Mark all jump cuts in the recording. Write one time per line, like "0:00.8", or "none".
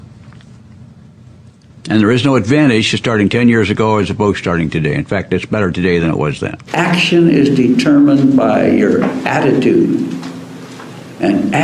0:06.6